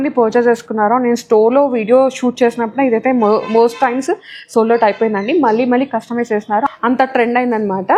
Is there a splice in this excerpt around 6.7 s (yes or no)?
no